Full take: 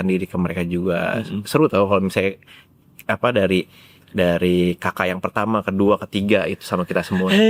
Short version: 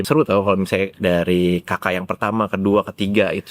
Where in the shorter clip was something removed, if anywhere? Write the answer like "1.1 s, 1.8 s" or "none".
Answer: 0.9 s